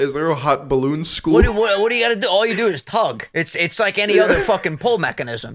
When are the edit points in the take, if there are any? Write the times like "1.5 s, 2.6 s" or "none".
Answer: 3.3 s